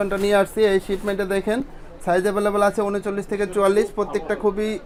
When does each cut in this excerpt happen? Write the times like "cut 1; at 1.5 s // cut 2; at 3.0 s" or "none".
none